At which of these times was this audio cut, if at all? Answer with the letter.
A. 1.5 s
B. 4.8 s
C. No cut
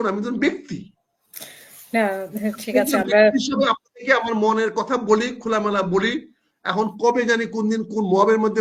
C